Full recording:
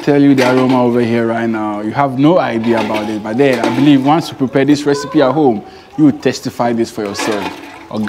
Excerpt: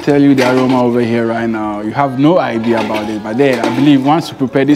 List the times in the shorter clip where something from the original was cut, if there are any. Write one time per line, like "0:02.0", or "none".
none